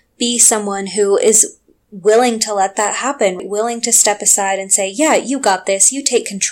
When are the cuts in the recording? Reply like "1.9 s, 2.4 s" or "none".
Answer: 3.4 s